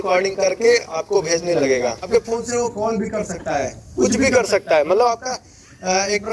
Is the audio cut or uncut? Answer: cut